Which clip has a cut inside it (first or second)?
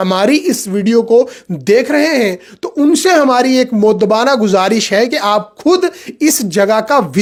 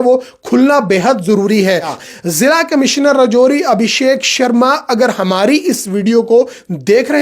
second